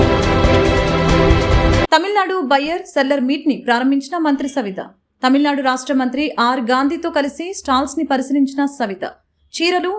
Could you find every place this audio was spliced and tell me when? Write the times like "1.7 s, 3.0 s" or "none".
none